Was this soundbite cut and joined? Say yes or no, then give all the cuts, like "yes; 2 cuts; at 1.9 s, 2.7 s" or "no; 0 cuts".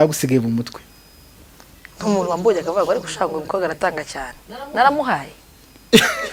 no; 0 cuts